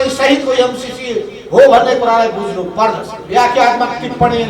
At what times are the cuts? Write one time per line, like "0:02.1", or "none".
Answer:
0:03.1